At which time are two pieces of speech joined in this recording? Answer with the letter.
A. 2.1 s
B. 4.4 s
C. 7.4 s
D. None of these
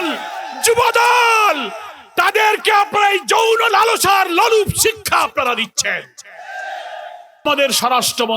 C